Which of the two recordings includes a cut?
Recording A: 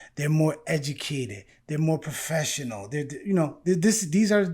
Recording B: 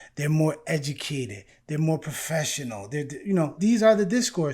B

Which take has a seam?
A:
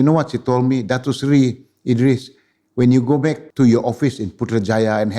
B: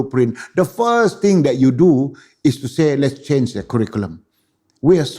A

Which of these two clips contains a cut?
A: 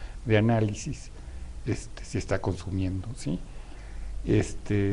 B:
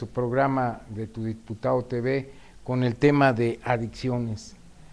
A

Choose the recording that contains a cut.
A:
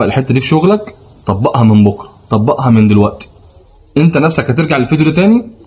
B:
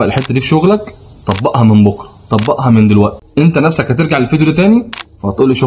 B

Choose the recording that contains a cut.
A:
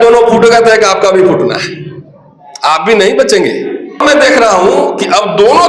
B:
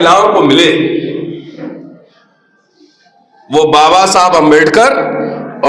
A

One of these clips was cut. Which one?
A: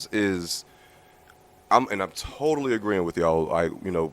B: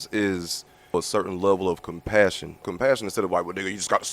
B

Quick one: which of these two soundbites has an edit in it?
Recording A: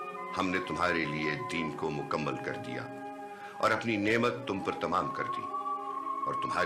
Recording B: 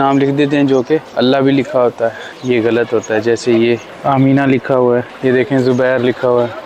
B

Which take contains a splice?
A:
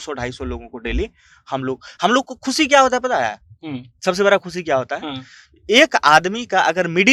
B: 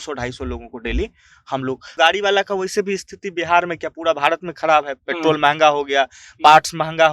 B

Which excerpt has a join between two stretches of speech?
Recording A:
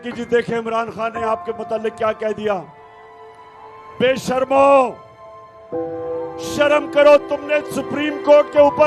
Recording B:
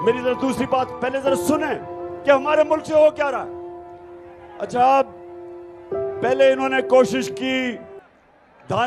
A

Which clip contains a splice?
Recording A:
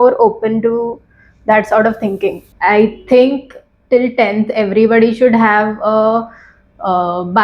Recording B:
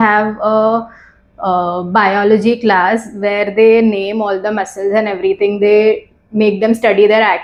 A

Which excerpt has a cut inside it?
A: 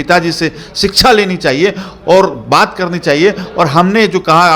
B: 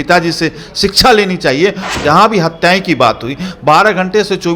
B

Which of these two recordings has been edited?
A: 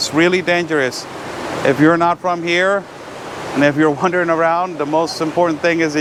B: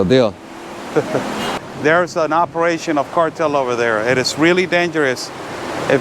B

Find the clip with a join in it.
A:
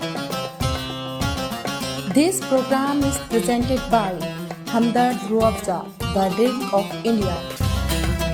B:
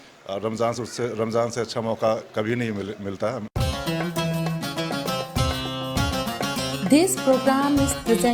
B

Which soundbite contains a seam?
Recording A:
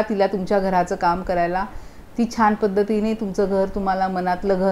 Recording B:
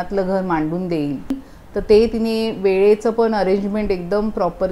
B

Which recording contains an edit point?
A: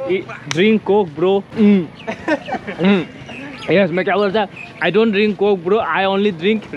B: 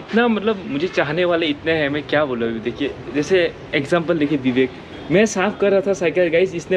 A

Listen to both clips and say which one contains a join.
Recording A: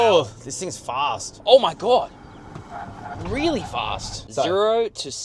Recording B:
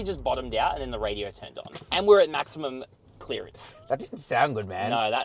A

